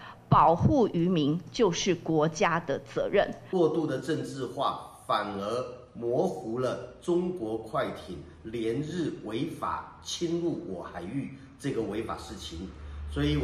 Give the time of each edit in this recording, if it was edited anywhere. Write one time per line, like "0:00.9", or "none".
0:03.4